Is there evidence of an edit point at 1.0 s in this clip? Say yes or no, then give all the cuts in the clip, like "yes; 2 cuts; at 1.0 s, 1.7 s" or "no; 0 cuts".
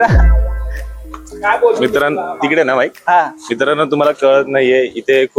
no; 0 cuts